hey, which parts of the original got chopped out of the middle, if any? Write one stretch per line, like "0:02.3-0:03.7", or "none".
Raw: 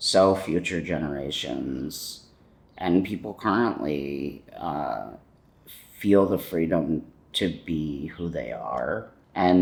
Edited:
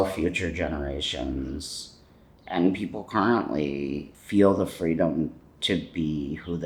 0:04.4-0:05.8